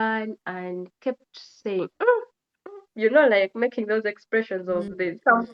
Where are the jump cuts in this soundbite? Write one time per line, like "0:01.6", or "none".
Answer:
none